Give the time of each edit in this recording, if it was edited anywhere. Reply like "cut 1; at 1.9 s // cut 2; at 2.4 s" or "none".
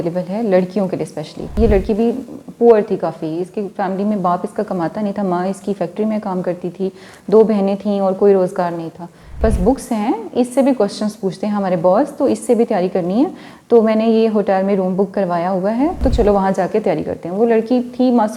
cut 1; at 1.5 s // cut 2; at 9.4 s // cut 3; at 16.0 s